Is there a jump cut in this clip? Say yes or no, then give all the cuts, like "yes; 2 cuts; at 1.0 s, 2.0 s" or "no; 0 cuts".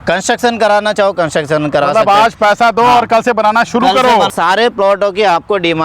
yes; 1 cut; at 4.3 s